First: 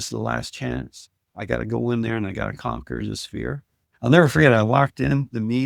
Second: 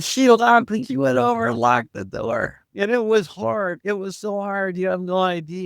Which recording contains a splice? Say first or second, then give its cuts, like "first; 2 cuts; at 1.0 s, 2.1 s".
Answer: second; 1 cut; at 2.6 s